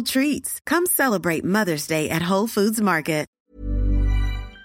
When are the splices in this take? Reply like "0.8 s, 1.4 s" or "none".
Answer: 3.3 s